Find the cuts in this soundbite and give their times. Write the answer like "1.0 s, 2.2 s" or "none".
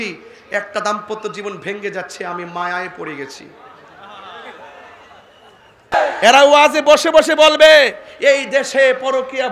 5.9 s